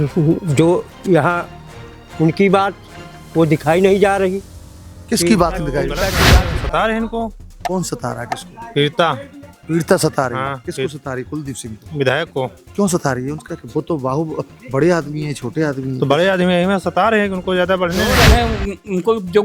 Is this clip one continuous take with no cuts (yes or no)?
no